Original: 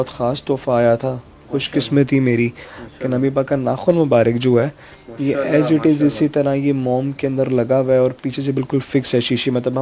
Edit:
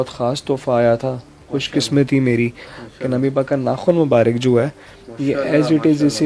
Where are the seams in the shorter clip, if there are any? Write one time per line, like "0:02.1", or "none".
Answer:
none

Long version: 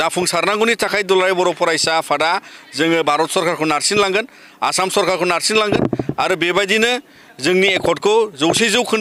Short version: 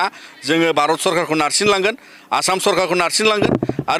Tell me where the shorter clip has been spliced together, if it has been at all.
none

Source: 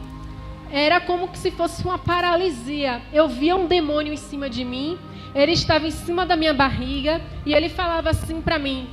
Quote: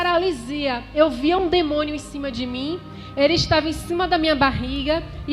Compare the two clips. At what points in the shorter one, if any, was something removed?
none

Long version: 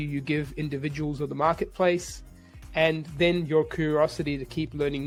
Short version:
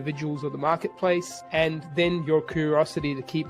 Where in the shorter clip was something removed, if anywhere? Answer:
0:01.4

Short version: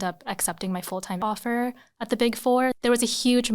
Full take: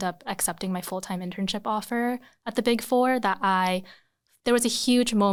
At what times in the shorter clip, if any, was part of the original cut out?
0:01.2
0:02.7

